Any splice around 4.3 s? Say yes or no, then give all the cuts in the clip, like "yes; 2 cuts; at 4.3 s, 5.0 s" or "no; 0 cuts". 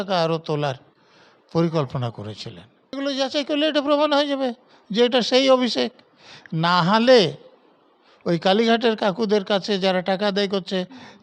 no; 1 cut; at 3.0 s